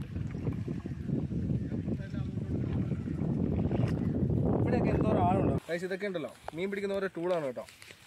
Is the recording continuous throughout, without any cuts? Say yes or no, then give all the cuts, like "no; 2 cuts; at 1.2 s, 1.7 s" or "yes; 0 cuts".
no; 1 cut; at 5.6 s